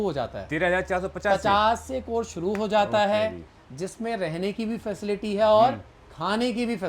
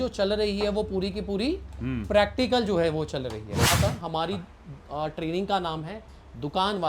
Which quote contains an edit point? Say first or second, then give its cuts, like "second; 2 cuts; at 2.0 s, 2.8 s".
second; 1 cut; at 3.8 s